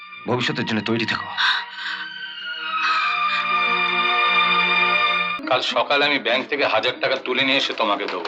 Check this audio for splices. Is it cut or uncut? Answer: cut